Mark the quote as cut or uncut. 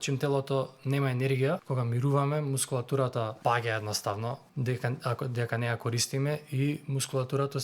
cut